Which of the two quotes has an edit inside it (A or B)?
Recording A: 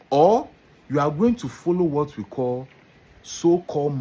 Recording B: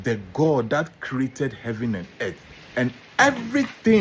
B